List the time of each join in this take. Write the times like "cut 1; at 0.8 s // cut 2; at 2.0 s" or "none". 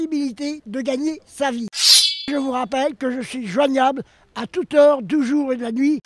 cut 1; at 2.0 s